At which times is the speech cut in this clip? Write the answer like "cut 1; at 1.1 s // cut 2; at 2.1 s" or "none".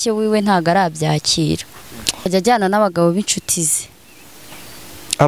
cut 1; at 2.3 s

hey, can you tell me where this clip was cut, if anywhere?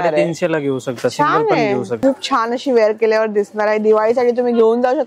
cut 1; at 2.0 s

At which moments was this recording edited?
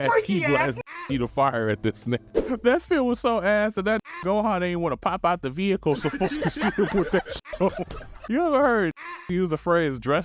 cut 1; at 2.3 s

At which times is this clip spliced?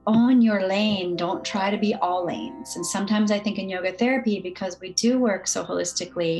none

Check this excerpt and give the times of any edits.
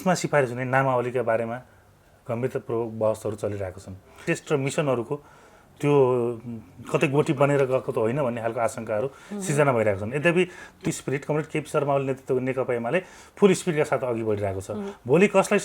cut 1; at 4.3 s // cut 2; at 10.9 s

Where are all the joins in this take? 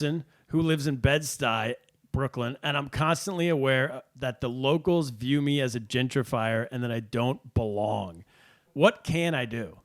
cut 1; at 8.7 s

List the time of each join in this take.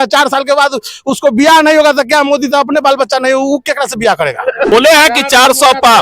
cut 1; at 4.7 s

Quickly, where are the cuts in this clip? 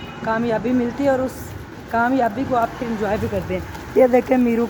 none

